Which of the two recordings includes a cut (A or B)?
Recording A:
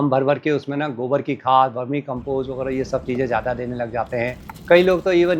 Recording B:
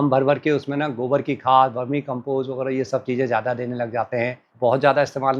B